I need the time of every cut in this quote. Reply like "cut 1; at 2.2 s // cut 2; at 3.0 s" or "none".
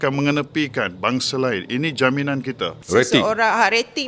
cut 1; at 2.7 s